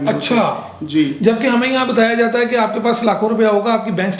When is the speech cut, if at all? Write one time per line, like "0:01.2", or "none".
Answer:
none

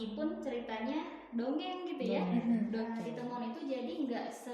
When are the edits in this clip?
0:02.9

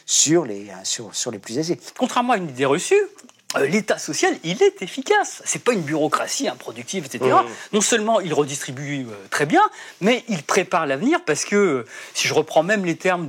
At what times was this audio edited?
0:01.9

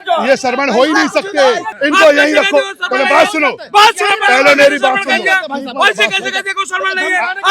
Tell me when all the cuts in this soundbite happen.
0:01.7

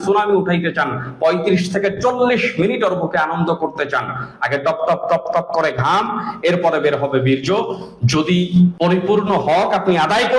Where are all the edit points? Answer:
0:08.8

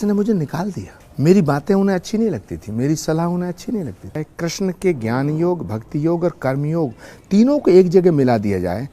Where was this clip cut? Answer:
0:04.2

